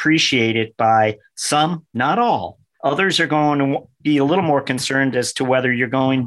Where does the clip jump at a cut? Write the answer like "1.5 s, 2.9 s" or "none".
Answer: none